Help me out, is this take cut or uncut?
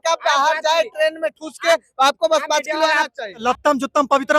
cut